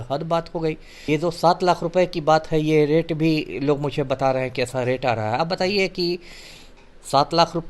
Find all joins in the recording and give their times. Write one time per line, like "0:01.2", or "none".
0:00.9

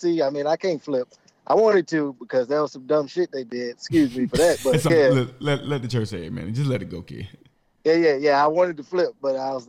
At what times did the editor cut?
0:04.9

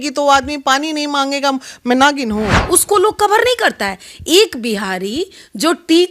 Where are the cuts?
0:02.6

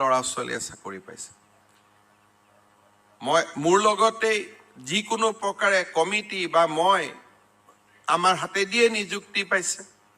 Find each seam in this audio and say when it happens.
0:01.6

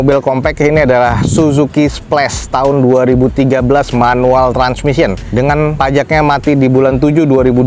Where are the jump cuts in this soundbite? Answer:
none

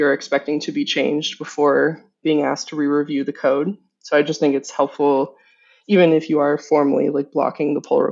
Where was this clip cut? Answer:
none

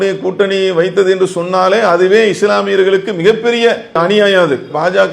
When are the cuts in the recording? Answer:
0:04.0

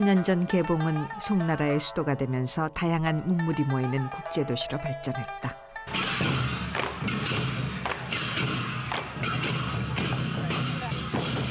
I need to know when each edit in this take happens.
none

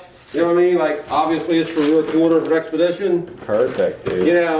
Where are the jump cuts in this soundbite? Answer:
none

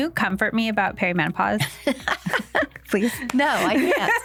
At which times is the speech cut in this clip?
none

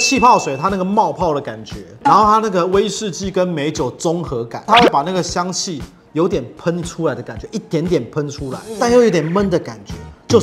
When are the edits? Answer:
none

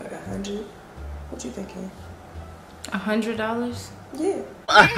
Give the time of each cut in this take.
none

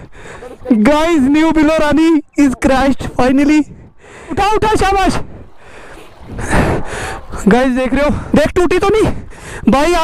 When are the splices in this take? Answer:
0:04.4
0:08.2

